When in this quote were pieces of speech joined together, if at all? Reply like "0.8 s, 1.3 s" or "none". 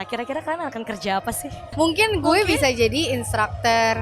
1.7 s